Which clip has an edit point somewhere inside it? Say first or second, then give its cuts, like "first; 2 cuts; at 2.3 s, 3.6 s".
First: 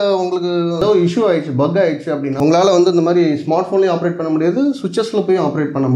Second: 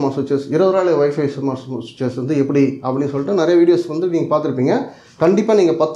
first; 2 cuts; at 0.8 s, 2.3 s